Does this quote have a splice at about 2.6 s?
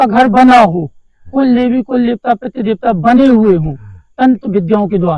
no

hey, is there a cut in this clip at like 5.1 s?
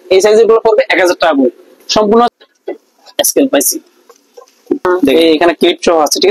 yes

